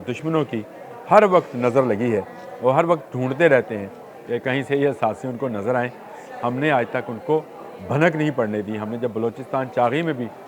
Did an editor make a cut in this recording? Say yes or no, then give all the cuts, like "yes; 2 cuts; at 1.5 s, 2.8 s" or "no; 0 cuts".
no; 0 cuts